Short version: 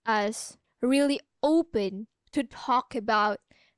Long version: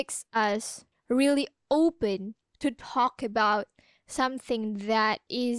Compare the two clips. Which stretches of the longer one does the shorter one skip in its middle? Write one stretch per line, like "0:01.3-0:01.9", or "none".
none